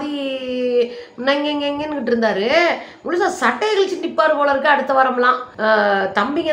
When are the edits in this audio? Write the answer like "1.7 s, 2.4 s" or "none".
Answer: none